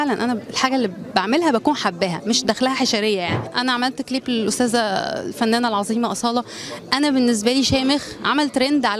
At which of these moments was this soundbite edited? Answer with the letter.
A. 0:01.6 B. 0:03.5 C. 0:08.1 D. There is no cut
B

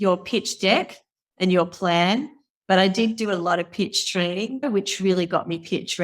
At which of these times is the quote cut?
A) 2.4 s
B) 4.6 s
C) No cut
B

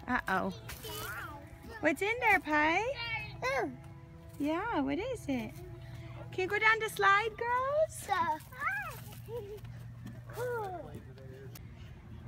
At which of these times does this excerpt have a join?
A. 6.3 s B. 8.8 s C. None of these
B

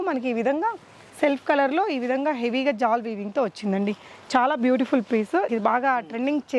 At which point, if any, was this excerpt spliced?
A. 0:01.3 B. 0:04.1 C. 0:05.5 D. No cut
C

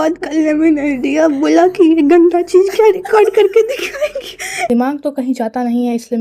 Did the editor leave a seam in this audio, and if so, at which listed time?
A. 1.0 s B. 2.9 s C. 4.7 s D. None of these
C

